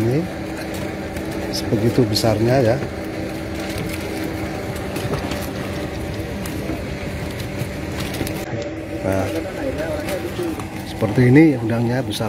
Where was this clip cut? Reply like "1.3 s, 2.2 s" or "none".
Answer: 8.4 s